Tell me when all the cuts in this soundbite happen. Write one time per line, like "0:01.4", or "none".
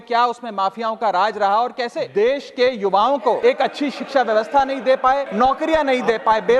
0:02.0
0:03.4
0:05.3